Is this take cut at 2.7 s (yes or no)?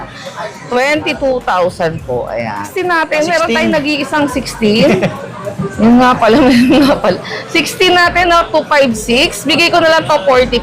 yes